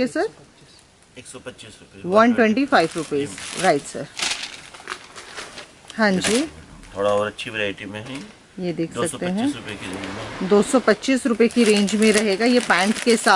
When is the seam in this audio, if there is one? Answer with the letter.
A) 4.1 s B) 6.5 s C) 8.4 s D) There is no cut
A